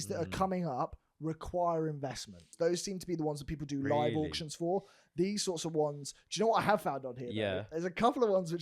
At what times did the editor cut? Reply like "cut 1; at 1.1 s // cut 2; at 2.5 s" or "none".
cut 1; at 2.4 s